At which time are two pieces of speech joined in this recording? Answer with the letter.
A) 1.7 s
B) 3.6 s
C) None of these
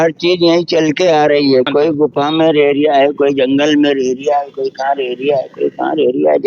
A